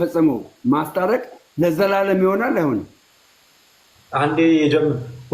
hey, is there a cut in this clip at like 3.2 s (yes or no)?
no